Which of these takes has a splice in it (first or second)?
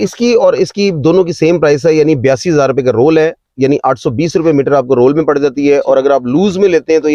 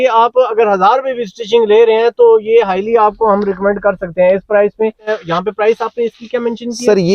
second